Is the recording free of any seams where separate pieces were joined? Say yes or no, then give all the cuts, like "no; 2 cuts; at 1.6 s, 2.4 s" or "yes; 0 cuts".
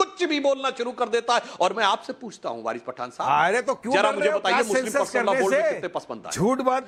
yes; 0 cuts